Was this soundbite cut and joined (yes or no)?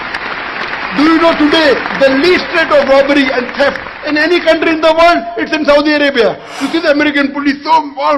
yes